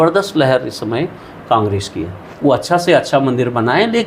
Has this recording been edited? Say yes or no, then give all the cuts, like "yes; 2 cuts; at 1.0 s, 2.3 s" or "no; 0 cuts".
yes; 1 cut; at 2.2 s